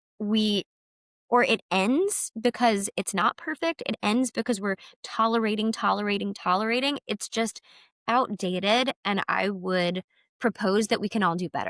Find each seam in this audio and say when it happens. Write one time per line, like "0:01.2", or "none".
none